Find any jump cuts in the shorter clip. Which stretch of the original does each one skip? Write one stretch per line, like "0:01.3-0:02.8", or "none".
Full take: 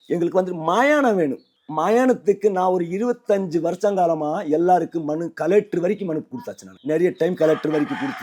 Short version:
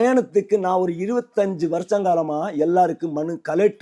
none

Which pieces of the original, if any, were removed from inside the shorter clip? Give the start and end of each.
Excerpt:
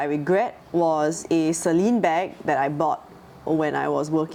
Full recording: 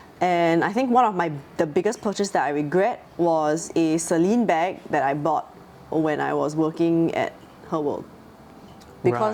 none

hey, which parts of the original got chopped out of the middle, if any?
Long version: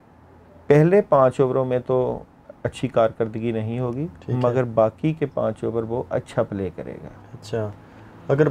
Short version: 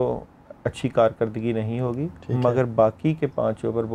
none

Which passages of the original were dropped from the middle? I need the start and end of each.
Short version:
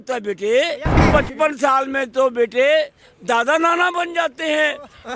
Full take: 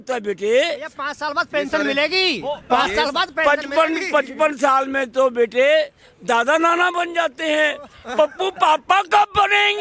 0:01.0-0:04.0

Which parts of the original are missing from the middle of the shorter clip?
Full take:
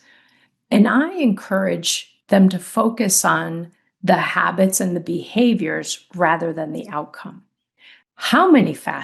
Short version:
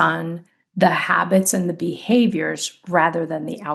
none

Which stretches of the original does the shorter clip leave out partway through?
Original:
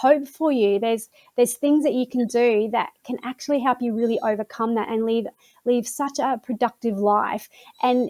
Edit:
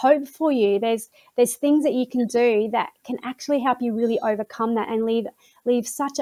none

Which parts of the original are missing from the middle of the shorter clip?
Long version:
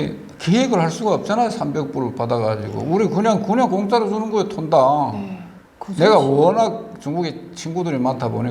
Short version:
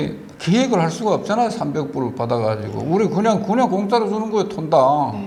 none

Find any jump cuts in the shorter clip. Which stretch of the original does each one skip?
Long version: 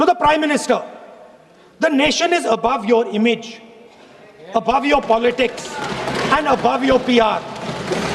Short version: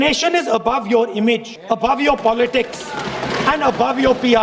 0:03.5-0:04.4

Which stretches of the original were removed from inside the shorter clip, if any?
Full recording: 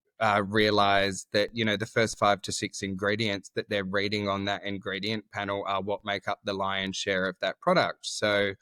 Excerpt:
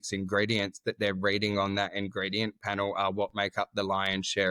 none

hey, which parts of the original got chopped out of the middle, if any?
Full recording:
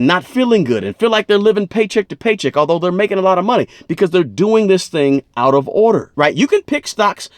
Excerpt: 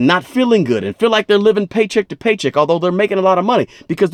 none

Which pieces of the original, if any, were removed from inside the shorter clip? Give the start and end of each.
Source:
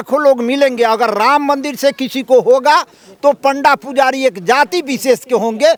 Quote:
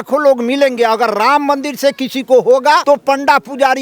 0:02.8-0:03.2

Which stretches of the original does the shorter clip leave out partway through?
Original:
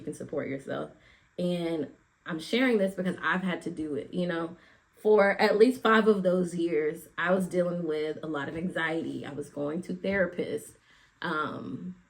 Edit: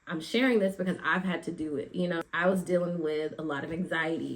0:04.4-0:07.1

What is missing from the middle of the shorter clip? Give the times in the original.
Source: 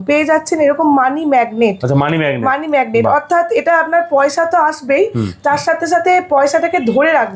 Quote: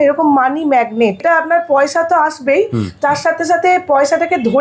0:01.8-0:03.6

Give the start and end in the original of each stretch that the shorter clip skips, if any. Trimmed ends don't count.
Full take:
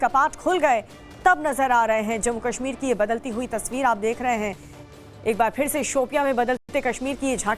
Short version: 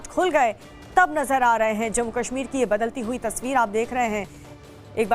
none

